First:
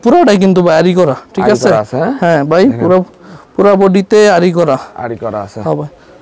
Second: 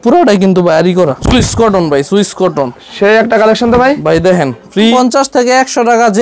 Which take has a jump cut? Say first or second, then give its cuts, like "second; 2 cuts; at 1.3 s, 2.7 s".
second; 2 cuts; at 1.2 s, 4.9 s